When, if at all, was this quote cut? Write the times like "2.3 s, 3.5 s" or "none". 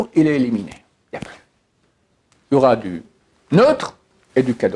none